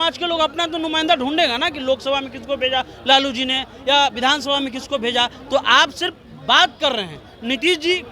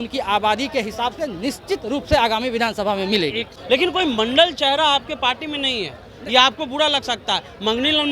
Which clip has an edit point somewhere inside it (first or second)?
second